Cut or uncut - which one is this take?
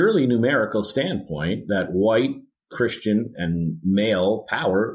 uncut